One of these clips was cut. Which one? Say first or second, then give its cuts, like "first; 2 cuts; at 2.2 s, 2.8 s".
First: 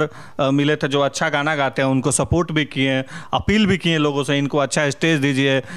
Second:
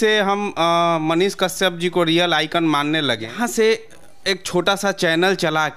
second; 1 cut; at 3.3 s